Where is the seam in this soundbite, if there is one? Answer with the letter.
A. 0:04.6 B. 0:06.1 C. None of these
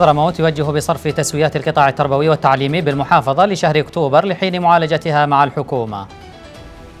B